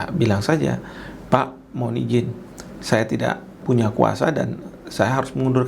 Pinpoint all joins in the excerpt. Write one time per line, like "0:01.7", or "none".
0:03.6